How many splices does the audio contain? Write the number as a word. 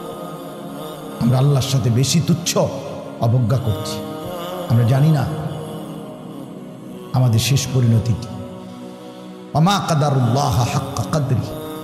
five